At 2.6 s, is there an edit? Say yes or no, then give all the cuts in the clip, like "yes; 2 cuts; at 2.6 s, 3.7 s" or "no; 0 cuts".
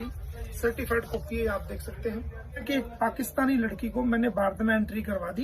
yes; 1 cut; at 2.6 s